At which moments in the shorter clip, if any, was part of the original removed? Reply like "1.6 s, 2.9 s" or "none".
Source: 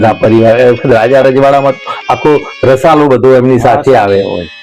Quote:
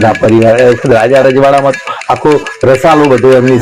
none